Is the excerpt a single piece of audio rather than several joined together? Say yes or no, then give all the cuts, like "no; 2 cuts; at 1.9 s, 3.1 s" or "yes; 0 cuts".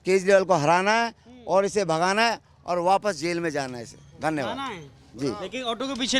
yes; 0 cuts